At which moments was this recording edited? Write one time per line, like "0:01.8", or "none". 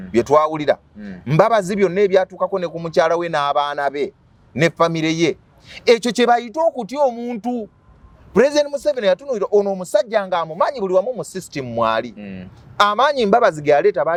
none